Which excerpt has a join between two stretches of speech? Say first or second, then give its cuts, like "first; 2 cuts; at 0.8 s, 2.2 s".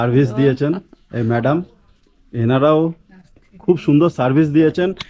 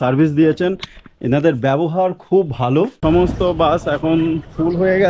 second; 1 cut; at 3.0 s